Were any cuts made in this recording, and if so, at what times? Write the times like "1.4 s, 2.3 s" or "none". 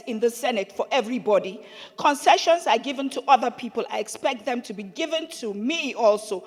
none